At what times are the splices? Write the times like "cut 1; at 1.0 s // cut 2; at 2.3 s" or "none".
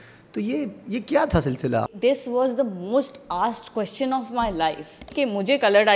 cut 1; at 1.8 s // cut 2; at 5.1 s